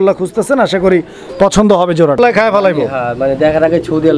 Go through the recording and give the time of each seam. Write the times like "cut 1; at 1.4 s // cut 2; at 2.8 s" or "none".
cut 1; at 2.2 s